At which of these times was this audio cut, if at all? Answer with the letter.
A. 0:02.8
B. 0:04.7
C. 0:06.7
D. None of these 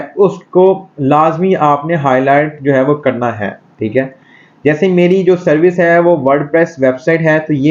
D